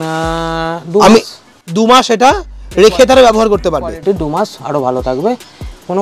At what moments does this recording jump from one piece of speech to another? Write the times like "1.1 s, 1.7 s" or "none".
none

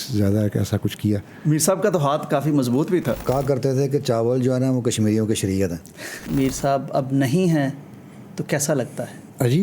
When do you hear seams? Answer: 3.2 s, 6.2 s

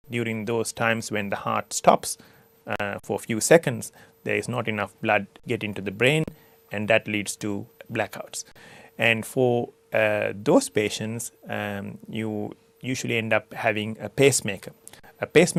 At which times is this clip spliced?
none

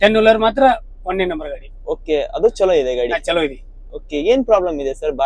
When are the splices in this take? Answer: none

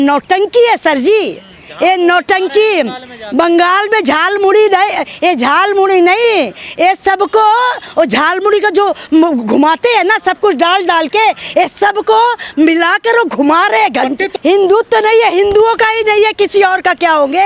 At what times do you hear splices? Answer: 14.3 s

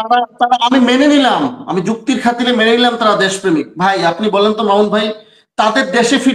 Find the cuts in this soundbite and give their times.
none

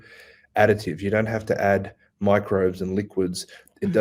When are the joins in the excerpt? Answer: none

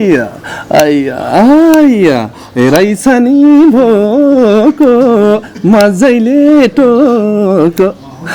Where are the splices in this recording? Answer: none

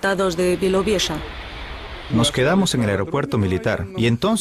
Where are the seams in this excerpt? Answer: 1.2 s

